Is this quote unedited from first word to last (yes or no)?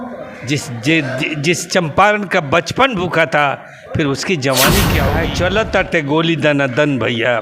no